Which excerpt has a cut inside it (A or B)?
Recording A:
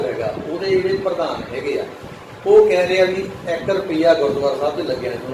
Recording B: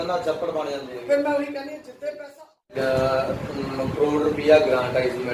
B